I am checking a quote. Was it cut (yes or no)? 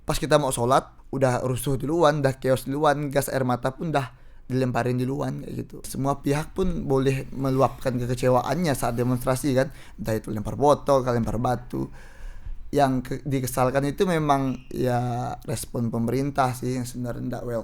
yes